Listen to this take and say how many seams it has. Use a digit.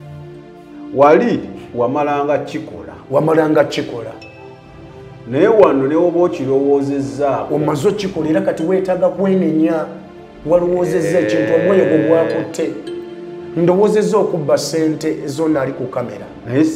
1